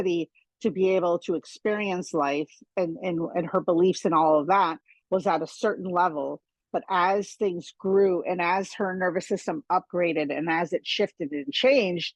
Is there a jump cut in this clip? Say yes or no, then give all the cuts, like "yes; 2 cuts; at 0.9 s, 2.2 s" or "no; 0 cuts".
no; 0 cuts